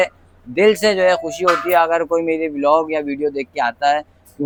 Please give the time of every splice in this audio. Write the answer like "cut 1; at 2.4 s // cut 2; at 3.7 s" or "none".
none